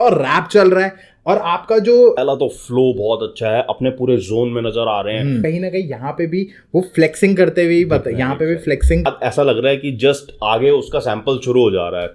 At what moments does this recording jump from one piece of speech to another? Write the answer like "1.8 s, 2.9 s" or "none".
2.2 s, 5.4 s, 9.0 s